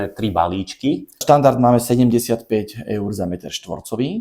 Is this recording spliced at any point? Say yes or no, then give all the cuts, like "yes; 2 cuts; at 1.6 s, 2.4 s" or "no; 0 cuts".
yes; 1 cut; at 1.2 s